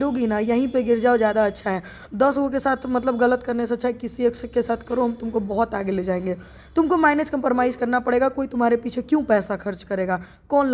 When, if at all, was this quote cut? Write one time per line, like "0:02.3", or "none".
none